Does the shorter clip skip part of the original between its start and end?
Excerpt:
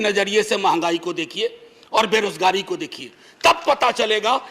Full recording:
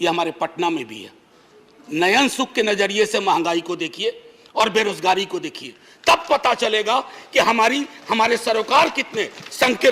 no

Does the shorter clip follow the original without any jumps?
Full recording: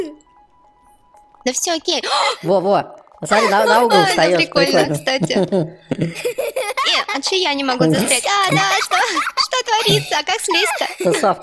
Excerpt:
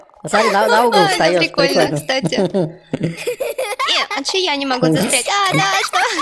yes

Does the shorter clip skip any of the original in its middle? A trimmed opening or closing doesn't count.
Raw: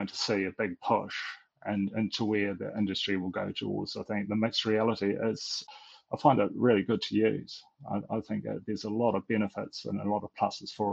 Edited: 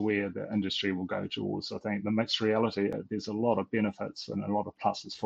yes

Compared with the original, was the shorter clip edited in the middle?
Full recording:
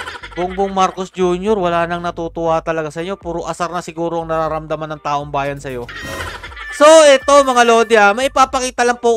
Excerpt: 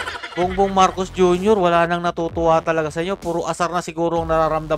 no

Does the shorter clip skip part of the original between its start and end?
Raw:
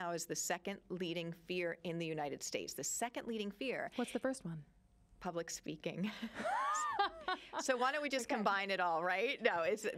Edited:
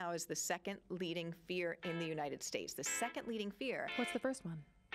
no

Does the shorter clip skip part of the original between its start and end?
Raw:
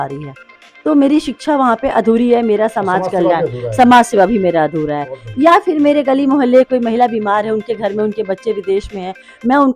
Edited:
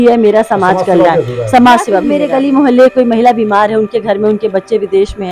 yes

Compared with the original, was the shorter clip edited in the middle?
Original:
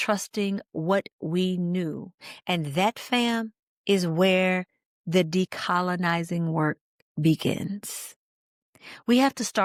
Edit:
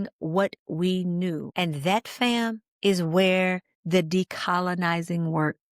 yes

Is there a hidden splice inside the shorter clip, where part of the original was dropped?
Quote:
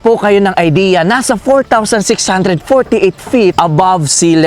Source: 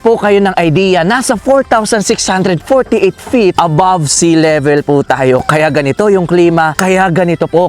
no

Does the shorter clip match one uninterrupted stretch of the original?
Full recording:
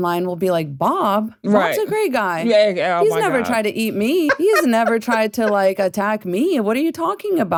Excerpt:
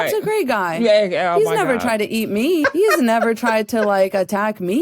yes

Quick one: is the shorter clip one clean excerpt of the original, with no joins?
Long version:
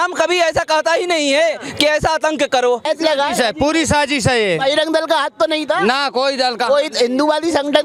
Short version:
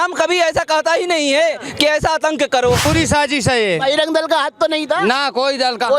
no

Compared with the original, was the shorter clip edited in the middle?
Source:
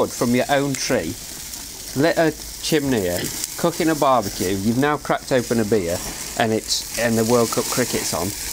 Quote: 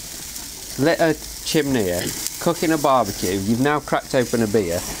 no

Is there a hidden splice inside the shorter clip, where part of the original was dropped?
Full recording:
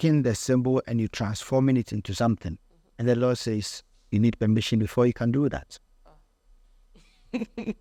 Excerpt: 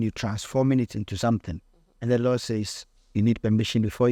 no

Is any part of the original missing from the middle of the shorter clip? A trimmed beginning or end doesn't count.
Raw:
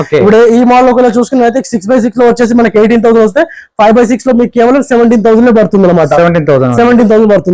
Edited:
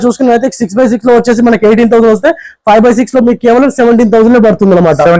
no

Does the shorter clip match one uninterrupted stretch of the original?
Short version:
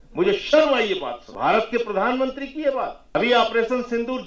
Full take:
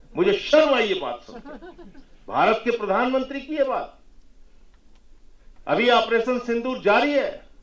no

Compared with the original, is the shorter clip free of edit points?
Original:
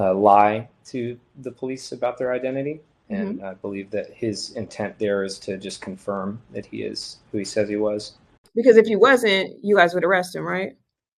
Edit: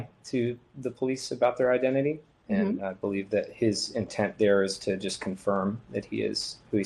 yes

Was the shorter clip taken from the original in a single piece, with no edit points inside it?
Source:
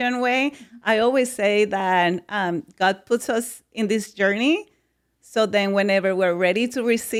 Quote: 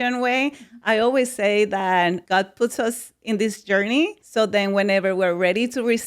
no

